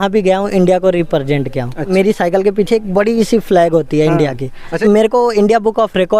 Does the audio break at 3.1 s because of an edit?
no; 2 cuts; at 1.9 s, 4.7 s

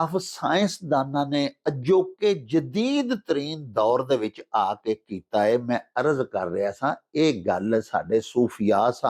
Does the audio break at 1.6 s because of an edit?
no; 0 cuts

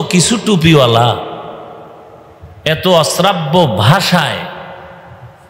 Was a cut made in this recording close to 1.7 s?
no; 0 cuts

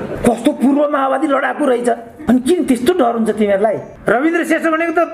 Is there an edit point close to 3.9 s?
yes; 2 cuts; at 2.1 s, 3.9 s

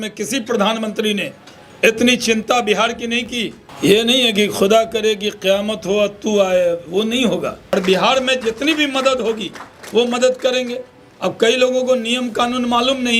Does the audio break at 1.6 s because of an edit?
no; 2 cuts; at 3.6 s, 7.6 s

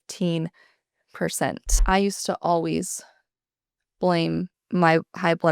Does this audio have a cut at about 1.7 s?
yes; 1 cut; at 1.7 s

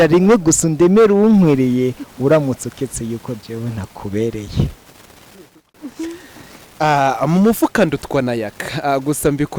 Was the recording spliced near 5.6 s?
yes; 1 cut; at 5.6 s

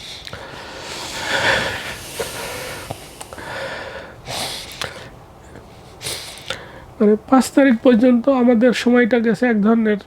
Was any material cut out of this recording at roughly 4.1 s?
no; 0 cuts

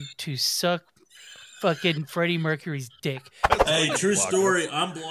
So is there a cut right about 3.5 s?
yes; 1 cut; at 3.5 s

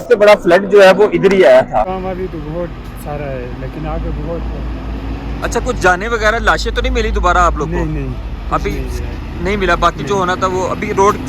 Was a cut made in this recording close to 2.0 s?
yes; 1 cut; at 2.0 s

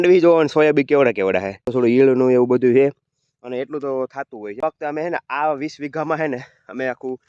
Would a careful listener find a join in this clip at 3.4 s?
no; 2 cuts; at 1.6 s, 4.6 s

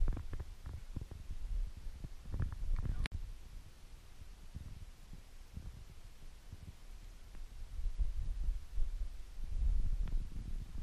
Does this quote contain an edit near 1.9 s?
no; 0 cuts

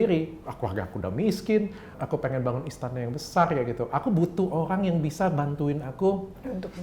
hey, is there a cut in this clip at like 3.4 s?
no; 1 cut; at 1.9 s

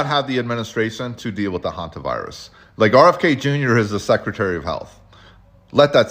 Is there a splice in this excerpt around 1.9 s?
no; 0 cuts

